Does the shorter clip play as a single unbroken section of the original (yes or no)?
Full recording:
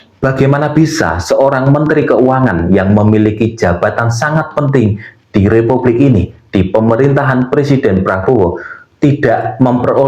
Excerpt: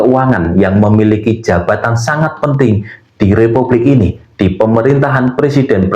yes